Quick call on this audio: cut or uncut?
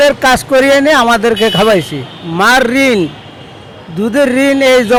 uncut